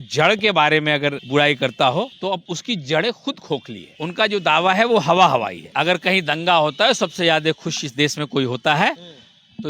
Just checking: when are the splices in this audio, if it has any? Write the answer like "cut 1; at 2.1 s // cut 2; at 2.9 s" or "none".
cut 1; at 1.2 s // cut 2; at 2.4 s // cut 3; at 3.8 s // cut 4; at 5.6 s